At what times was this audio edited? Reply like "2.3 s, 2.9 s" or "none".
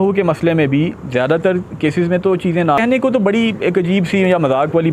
2.8 s